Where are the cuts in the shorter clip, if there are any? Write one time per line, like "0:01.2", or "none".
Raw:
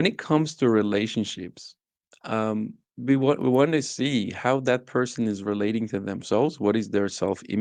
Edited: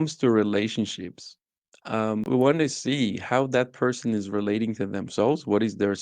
0:02.3